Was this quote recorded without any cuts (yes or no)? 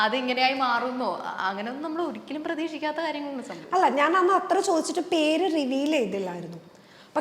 yes